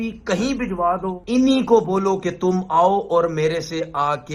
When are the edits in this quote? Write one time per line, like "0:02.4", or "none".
0:01.2